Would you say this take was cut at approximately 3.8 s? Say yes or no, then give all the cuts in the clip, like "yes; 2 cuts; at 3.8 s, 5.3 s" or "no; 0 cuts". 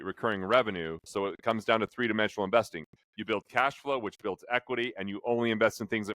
no; 1 cut; at 1.1 s